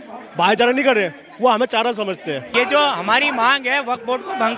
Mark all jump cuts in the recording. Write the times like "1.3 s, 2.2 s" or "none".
2.5 s